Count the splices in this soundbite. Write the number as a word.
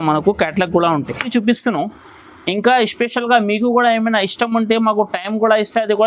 one